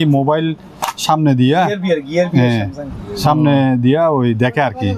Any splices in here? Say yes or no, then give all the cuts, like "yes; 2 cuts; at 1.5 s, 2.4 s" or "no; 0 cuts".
no; 0 cuts